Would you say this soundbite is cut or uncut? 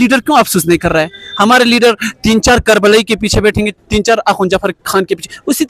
uncut